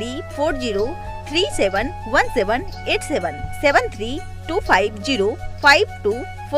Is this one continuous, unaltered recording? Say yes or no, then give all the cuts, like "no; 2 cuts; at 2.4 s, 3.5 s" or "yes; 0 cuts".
yes; 0 cuts